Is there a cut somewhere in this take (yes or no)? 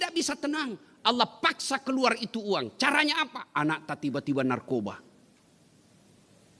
no